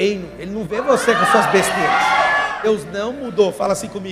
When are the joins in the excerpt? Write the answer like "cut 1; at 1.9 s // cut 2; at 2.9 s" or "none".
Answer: cut 1; at 2.7 s